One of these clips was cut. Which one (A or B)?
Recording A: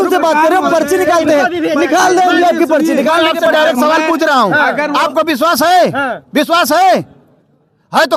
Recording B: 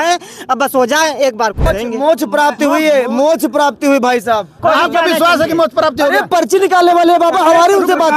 B